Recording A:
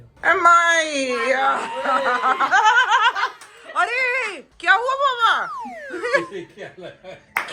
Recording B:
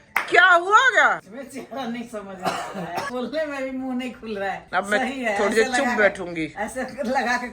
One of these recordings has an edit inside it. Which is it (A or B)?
B